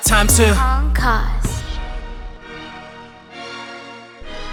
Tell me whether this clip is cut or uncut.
uncut